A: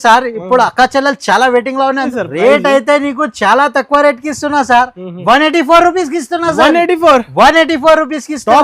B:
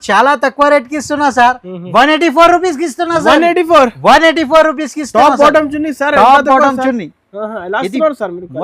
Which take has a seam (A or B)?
A